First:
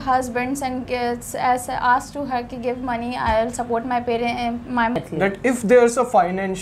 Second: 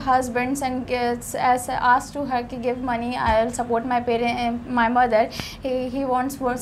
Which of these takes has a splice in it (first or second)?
first